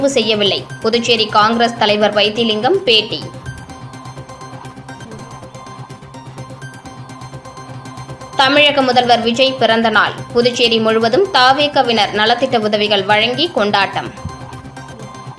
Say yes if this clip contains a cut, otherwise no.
no